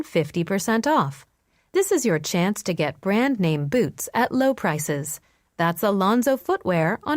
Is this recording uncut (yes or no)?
no